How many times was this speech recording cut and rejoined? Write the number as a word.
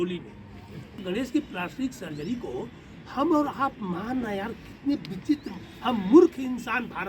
one